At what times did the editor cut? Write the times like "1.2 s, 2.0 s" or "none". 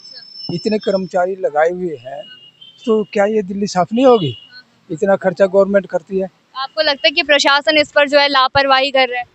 none

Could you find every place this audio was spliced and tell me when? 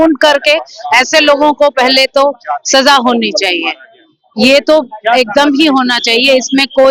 none

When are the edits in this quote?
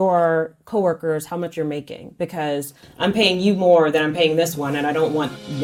none

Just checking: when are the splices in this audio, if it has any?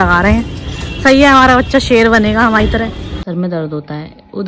3.2 s

